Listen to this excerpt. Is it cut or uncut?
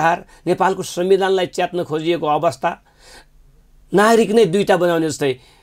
uncut